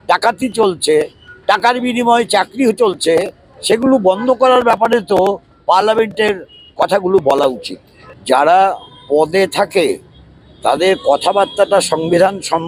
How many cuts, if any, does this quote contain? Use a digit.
1